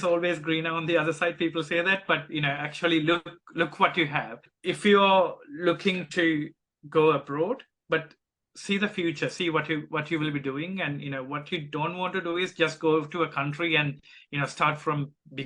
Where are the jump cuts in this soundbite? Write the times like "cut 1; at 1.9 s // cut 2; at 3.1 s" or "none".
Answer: cut 1; at 4.5 s